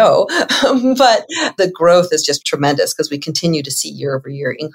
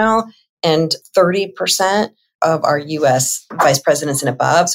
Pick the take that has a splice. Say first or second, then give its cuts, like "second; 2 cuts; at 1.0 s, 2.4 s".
first; 2 cuts; at 1.4 s, 2.4 s